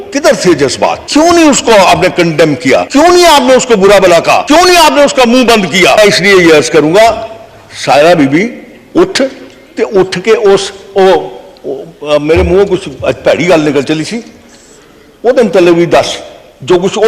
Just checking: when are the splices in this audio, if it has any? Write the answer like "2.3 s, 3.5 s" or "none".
1.0 s, 2.9 s, 4.4 s, 6.0 s

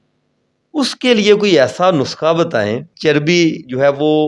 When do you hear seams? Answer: 2.9 s

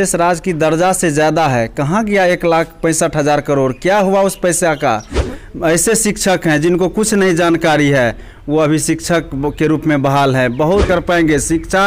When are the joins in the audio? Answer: 5.3 s, 10.9 s

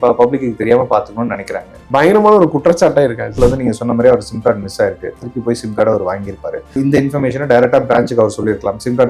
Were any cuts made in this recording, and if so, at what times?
1.9 s, 3.3 s, 6.8 s

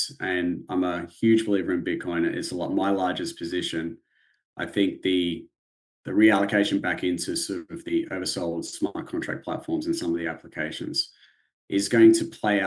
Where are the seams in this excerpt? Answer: none

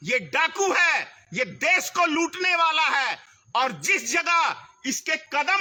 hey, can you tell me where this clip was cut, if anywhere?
none

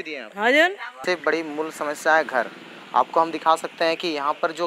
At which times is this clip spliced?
0.9 s

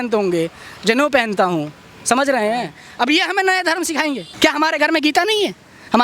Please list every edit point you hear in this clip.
2.8 s, 4.3 s

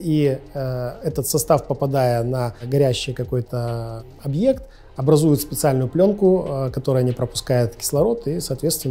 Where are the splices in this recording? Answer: 2.6 s, 4.1 s

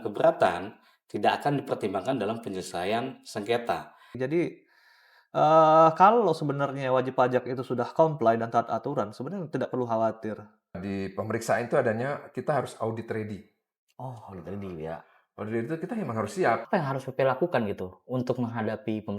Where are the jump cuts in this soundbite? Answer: 4.2 s, 10.8 s, 16.6 s

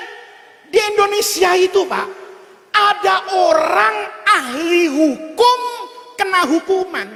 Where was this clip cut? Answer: none

